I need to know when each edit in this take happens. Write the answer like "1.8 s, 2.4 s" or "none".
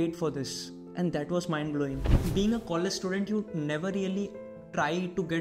2.1 s